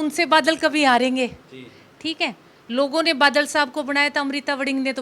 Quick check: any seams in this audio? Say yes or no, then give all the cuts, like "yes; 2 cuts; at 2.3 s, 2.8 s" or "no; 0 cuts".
no; 0 cuts